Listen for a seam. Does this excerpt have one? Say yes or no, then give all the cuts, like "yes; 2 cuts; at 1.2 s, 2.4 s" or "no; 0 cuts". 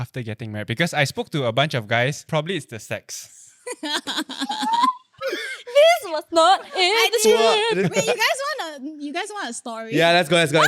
yes; 2 cuts; at 2.2 s, 7.8 s